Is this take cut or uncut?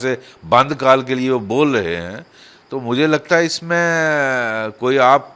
uncut